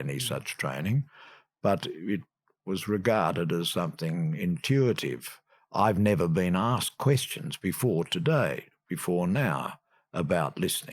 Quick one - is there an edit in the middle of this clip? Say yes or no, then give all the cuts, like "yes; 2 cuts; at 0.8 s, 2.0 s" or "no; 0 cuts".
no; 0 cuts